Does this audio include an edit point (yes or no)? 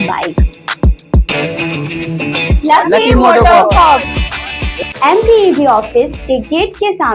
no